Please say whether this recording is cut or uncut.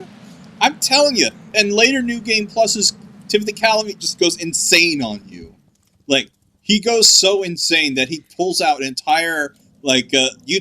uncut